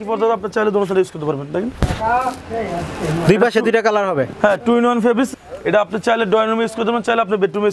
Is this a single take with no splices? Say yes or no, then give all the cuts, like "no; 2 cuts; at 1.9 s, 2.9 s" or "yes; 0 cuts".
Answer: no; 1 cut; at 5.3 s